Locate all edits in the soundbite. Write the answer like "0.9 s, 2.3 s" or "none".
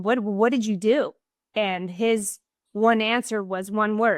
none